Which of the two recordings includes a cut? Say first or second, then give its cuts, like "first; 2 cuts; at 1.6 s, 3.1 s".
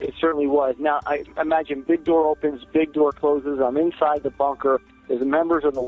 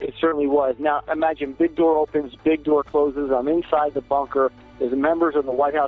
second; 1 cut; at 1.0 s